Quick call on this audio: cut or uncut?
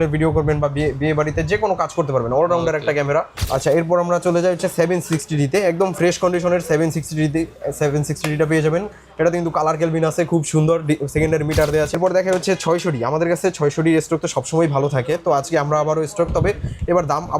cut